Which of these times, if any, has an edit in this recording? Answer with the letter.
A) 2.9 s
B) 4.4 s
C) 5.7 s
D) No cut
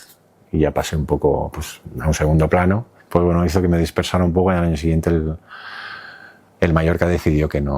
A